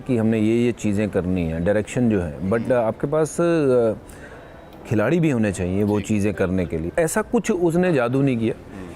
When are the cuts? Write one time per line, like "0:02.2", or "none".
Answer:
none